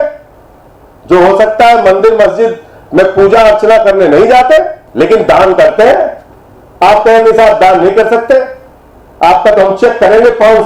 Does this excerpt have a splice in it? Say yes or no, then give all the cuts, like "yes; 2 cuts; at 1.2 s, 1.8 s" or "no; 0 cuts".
yes; 1 cut; at 4.8 s